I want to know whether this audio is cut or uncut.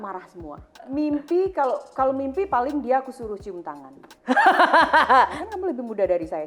cut